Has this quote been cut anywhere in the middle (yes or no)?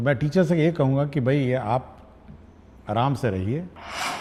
no